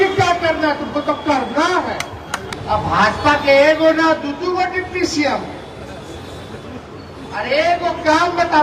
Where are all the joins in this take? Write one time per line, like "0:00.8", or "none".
0:02.5